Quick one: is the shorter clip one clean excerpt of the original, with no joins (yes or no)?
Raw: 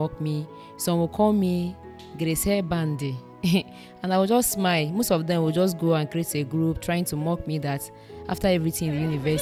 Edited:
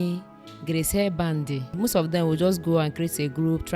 no